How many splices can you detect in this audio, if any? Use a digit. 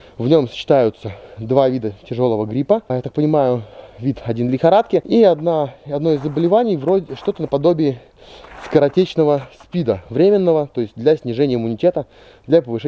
0